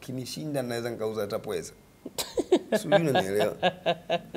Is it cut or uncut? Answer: uncut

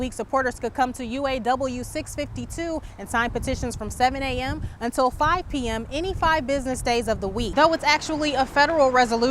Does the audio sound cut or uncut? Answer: cut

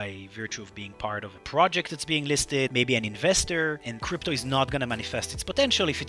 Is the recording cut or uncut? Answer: cut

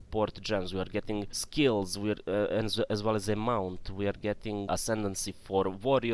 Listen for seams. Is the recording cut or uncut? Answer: cut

